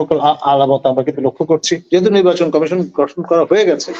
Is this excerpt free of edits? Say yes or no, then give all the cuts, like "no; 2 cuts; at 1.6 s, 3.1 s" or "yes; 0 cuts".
no; 1 cut; at 1.8 s